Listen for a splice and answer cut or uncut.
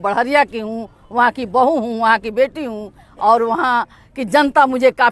uncut